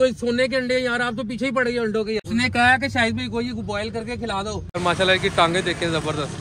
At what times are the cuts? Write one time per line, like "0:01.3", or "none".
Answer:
0:04.8